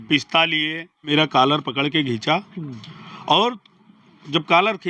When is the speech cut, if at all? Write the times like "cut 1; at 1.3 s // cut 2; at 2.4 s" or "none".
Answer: cut 1; at 1.1 s